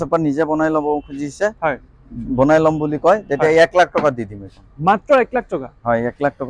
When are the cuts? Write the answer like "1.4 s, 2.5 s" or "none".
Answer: none